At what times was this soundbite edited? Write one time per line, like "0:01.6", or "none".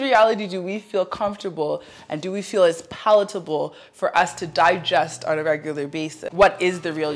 0:06.2